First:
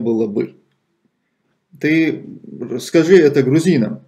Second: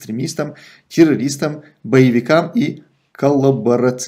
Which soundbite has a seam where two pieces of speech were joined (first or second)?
first